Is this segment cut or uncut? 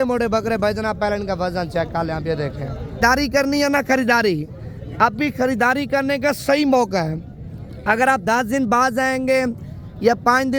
cut